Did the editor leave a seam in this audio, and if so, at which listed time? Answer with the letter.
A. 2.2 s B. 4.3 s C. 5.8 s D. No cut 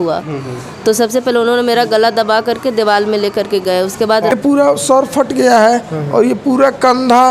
B